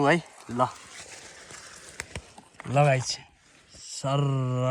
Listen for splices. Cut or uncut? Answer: uncut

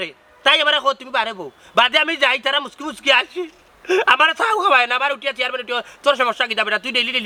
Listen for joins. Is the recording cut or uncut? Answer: uncut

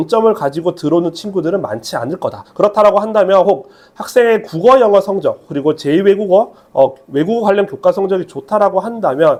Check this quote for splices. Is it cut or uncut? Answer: uncut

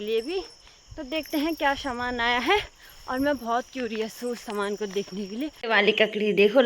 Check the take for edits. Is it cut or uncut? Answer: cut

